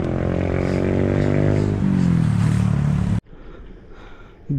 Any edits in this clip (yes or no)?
yes